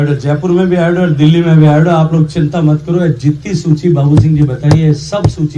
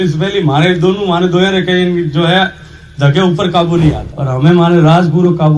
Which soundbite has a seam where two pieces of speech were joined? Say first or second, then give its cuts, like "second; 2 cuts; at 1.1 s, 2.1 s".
second; 1 cut; at 4.1 s